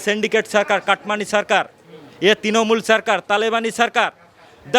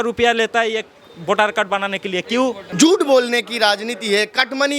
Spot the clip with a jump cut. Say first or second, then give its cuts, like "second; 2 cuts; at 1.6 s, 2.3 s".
second; 1 cut; at 2.6 s